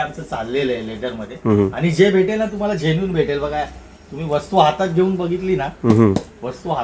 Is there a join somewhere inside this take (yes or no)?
no